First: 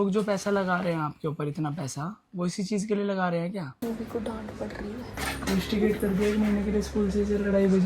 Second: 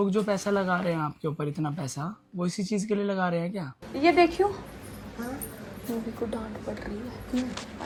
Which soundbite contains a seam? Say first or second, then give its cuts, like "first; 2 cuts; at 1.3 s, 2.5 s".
first; 2 cuts; at 3.7 s, 5.1 s